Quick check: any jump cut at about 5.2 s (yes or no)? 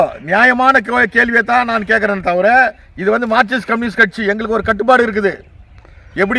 no